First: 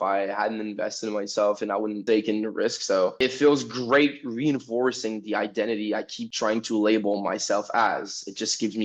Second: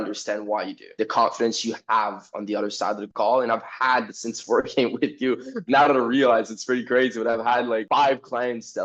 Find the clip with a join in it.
second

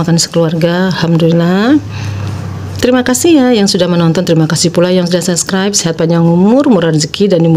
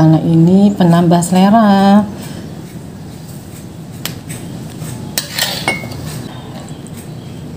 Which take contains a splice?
second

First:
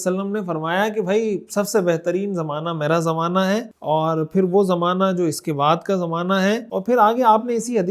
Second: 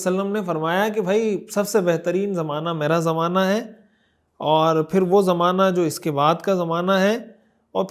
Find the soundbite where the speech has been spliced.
first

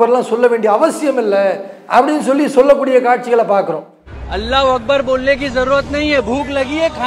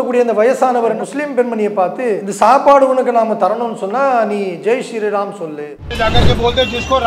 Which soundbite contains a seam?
second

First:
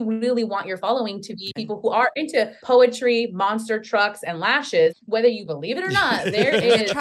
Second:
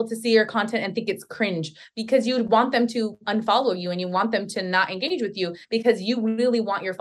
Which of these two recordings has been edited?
first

